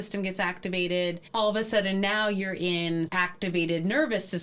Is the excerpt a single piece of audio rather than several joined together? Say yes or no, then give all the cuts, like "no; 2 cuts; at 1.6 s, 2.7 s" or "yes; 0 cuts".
no; 1 cut; at 3.1 s